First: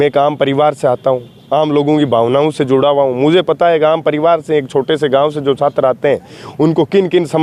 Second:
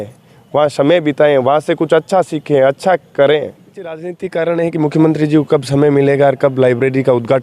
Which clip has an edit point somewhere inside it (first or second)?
second